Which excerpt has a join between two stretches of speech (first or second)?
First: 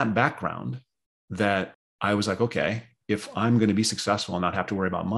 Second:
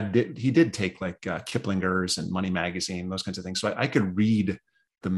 first